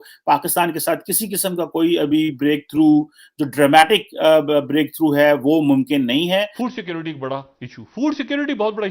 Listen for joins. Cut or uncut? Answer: cut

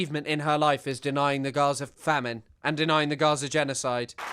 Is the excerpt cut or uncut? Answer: cut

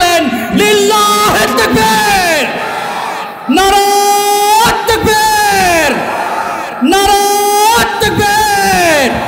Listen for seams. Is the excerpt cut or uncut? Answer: uncut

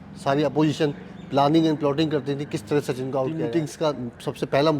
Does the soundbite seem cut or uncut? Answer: uncut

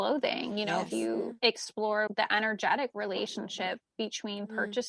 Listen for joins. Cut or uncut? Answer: cut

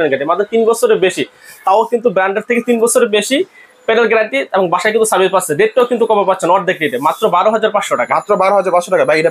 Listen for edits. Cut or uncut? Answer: uncut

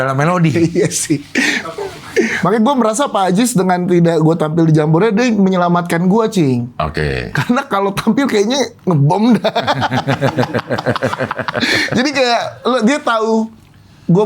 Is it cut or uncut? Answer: cut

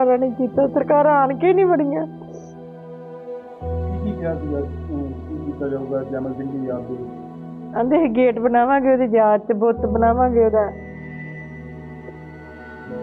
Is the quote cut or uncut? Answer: cut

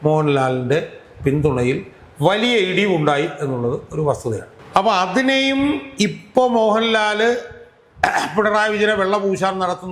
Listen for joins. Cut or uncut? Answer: cut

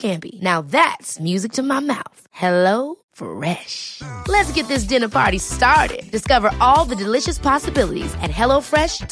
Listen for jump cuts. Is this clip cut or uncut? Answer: uncut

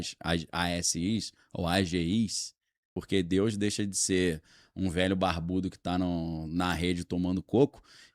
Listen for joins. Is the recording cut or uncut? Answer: cut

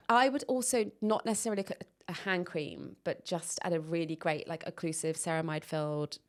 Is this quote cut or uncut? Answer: uncut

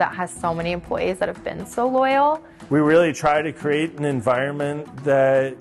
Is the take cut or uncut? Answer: cut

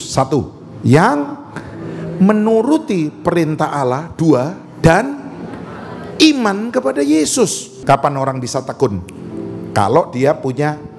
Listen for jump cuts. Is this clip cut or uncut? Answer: cut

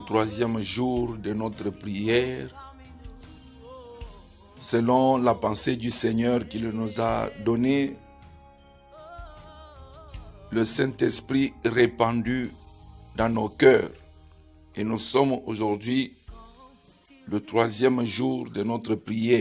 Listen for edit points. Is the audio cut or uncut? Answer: cut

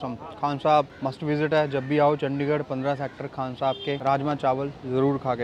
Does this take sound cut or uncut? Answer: cut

